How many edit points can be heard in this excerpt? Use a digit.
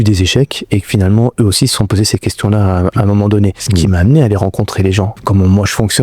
2